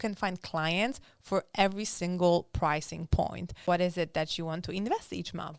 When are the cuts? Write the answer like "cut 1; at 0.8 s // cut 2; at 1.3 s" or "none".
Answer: cut 1; at 3.5 s

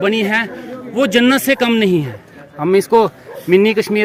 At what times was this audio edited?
none

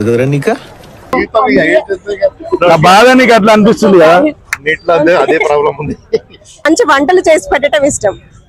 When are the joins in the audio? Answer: cut 1; at 6.7 s

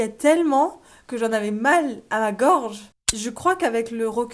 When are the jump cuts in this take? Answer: cut 1; at 3.1 s

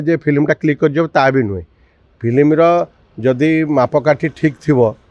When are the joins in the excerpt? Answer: none

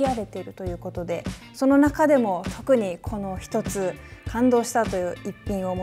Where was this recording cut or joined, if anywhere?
none

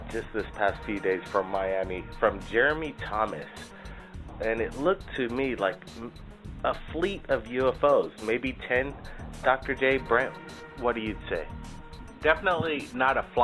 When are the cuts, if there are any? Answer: cut 1; at 7.6 s

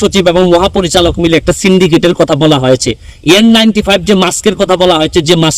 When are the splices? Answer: none

